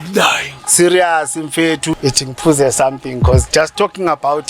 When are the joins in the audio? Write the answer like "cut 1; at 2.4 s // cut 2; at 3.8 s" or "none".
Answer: cut 1; at 1.9 s